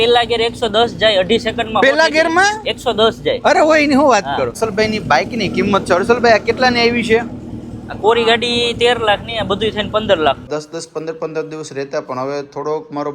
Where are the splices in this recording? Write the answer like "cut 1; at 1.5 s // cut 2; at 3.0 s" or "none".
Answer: cut 1; at 4.6 s // cut 2; at 10.5 s